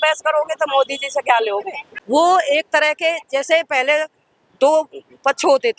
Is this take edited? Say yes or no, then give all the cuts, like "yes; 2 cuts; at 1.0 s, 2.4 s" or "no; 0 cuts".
yes; 1 cut; at 1.9 s